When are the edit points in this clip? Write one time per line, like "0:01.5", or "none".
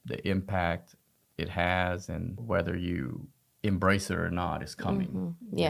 0:02.4